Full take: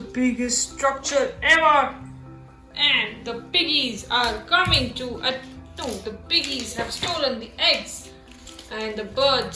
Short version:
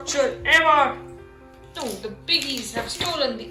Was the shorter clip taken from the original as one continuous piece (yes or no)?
no